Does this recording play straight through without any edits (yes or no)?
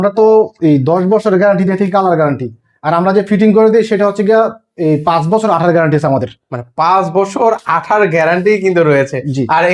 yes